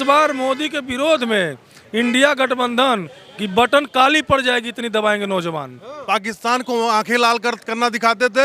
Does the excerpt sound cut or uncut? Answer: cut